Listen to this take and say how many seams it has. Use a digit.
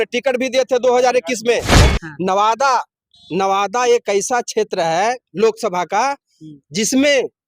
1